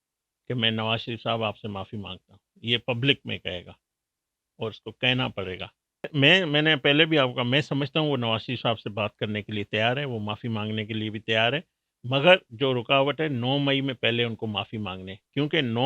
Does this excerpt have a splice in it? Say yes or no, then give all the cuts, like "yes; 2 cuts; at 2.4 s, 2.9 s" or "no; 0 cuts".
yes; 1 cut; at 6.1 s